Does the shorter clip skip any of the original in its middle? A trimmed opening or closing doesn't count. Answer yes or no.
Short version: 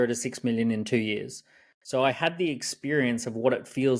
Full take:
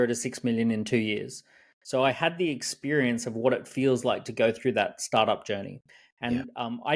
no